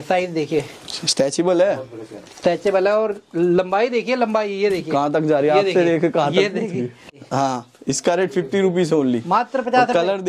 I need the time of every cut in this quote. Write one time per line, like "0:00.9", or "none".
0:07.1

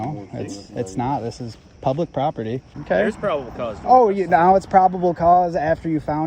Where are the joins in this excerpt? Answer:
0:02.7

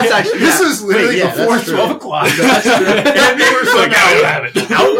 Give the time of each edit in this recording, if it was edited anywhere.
none

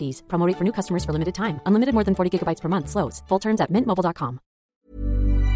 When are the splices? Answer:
0:04.6

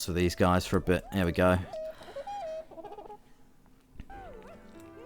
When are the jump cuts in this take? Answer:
0:01.8
0:04.1

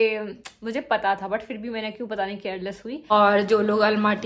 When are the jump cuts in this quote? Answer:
0:03.1

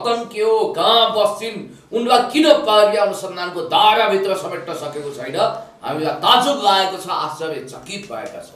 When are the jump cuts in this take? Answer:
none

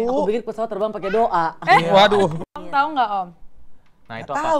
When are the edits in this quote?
0:02.5

